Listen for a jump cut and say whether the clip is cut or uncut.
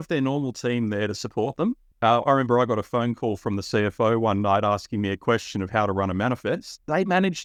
uncut